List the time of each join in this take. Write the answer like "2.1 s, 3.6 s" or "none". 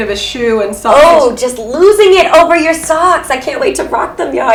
none